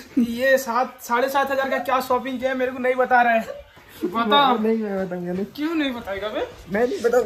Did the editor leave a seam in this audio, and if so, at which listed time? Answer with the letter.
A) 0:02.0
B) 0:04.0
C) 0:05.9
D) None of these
D